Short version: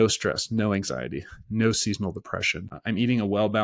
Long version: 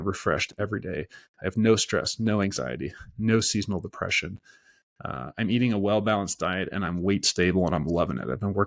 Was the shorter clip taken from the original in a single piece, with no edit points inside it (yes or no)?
no